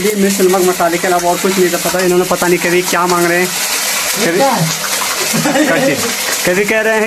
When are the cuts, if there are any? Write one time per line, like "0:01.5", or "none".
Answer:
none